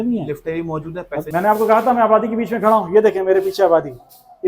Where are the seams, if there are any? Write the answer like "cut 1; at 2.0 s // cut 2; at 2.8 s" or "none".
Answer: cut 1; at 1.3 s

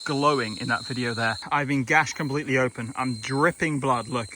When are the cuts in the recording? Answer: cut 1; at 1.4 s

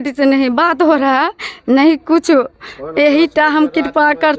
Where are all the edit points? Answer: none

